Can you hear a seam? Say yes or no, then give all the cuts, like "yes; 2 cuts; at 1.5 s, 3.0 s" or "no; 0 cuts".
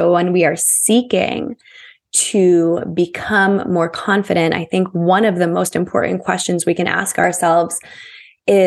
yes; 1 cut; at 7.2 s